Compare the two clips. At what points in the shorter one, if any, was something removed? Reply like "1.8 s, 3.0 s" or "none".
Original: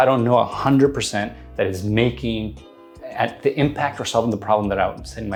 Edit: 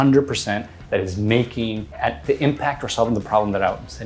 1.9 s